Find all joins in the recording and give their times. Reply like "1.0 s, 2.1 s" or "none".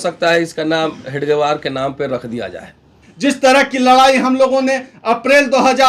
3.1 s